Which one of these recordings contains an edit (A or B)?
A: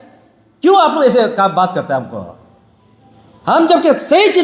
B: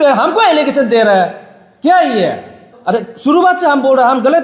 B